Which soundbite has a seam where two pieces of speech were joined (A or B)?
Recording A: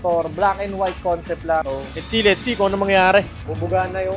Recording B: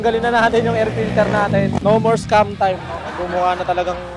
A